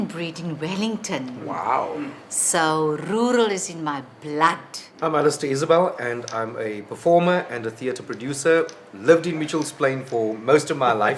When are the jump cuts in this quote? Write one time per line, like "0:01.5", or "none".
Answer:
none